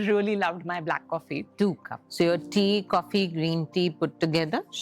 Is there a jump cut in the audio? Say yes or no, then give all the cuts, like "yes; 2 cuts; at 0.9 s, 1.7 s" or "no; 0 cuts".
yes; 1 cut; at 1.5 s